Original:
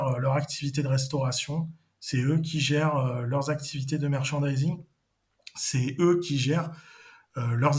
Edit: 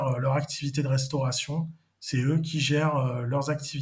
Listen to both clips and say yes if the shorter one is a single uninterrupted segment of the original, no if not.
yes